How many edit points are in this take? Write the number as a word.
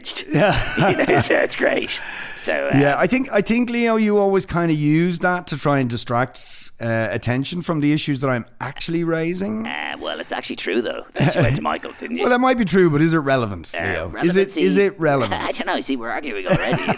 zero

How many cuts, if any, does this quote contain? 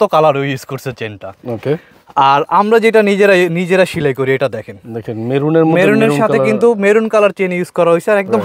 zero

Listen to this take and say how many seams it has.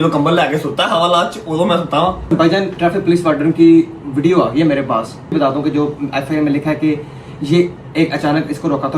two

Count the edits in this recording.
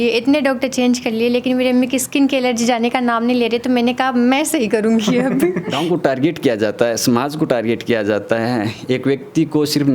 one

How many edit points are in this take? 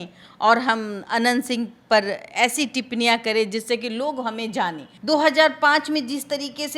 one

